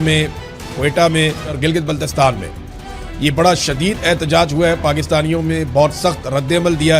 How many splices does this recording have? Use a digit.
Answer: 1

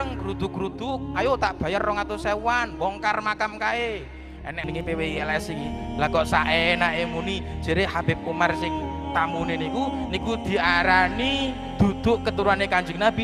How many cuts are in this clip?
1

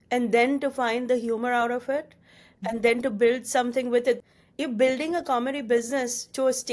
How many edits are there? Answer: 1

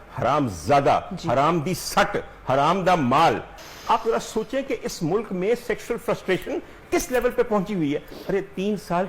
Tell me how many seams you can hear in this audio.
1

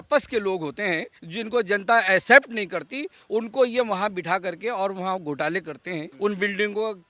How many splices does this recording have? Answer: 2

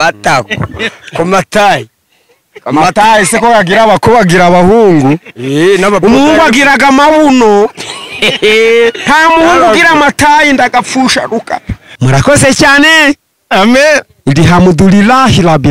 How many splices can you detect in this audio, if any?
1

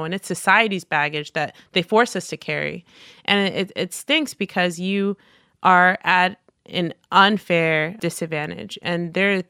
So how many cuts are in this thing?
1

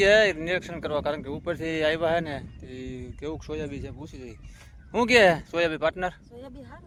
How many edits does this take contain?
0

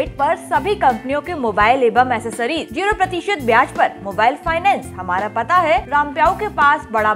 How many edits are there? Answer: 2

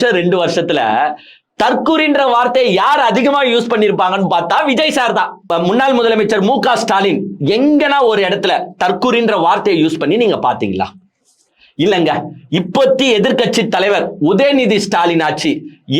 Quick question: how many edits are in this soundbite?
1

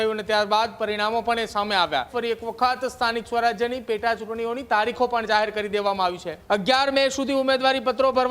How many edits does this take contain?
2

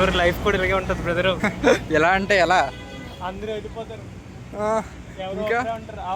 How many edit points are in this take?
0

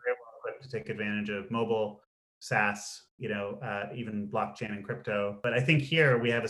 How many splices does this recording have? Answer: 1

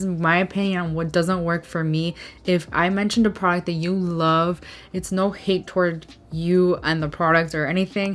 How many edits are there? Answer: 0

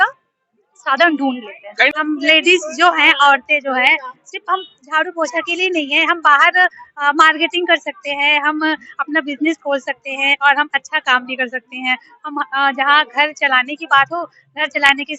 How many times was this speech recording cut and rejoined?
1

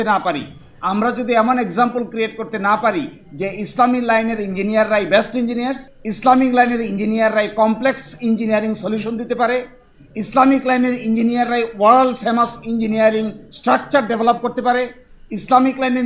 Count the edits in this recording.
0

